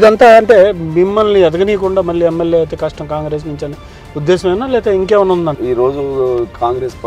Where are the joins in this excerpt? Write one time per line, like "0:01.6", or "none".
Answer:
0:05.5